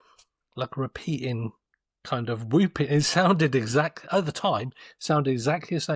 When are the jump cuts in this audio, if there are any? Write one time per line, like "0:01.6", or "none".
none